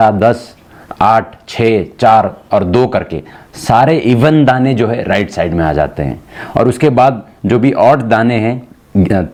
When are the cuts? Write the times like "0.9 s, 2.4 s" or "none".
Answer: none

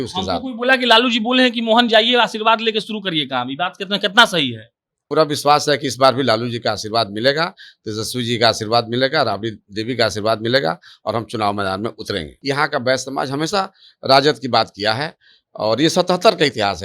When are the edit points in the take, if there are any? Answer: 5.1 s, 12.3 s

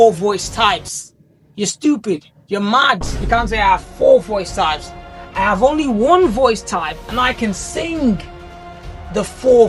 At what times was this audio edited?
none

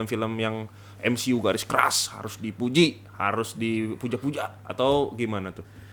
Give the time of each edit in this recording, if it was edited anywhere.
none

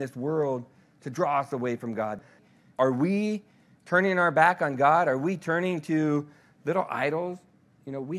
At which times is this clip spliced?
2.3 s

